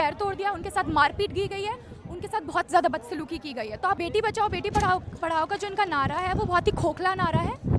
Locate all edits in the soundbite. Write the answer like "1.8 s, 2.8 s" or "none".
4.0 s